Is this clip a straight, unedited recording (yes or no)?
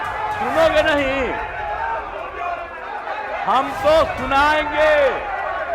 yes